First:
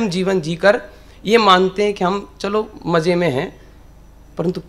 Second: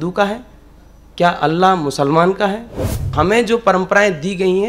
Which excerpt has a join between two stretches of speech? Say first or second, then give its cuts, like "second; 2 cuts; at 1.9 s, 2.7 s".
second; 1 cut; at 3.1 s